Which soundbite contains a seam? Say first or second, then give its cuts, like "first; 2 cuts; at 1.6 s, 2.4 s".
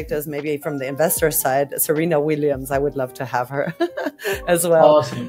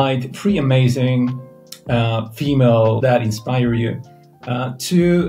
second; 1 cut; at 3.0 s